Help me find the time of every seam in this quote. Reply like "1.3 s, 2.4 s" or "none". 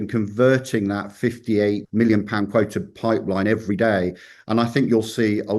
1.9 s

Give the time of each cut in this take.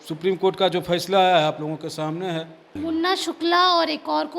2.7 s

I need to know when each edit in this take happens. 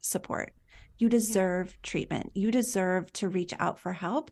none

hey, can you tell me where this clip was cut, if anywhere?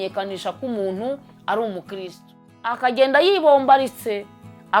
2.8 s

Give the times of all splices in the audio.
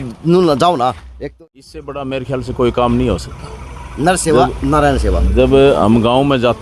1.1 s

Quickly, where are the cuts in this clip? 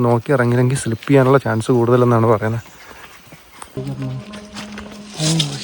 3.8 s

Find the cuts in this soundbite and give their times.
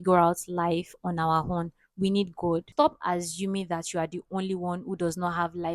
2.7 s

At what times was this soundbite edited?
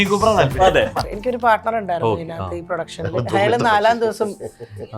1.1 s

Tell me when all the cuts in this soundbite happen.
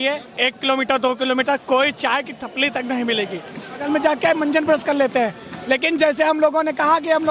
3.8 s

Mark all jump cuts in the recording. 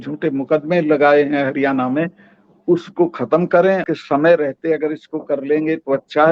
3.9 s

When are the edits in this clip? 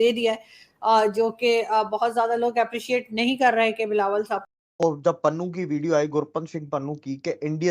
4.5 s

